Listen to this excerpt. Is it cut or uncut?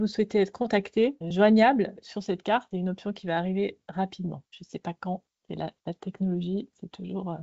cut